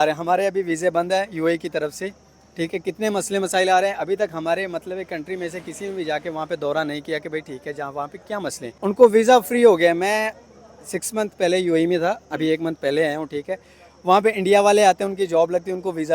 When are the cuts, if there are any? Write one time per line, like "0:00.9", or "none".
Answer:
0:08.7